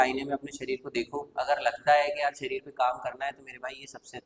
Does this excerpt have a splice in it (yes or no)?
no